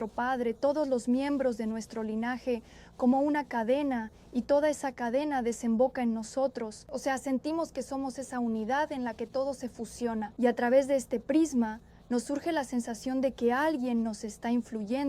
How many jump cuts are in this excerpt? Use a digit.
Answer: 2